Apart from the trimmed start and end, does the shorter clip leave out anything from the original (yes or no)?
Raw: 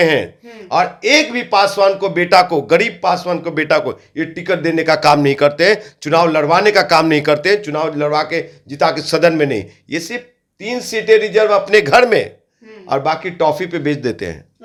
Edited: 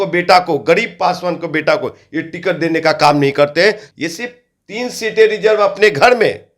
yes